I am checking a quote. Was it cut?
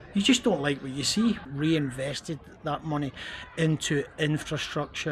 yes; 1 cut; at 1.4 s

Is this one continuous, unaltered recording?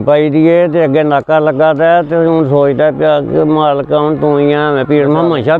yes; 0 cuts

